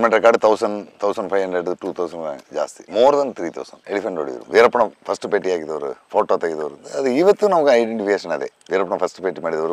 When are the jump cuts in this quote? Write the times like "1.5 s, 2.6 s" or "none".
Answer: 2.8 s, 4.3 s